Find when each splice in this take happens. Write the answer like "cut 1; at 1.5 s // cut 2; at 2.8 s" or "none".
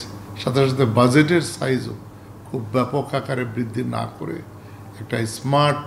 none